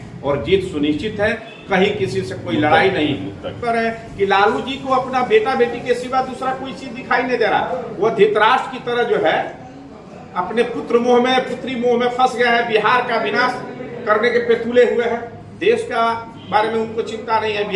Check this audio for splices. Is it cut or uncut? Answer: cut